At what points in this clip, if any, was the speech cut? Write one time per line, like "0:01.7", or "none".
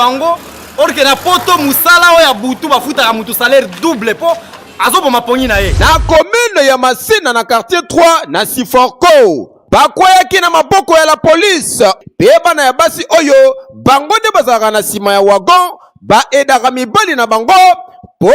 0:05.7
0:12.0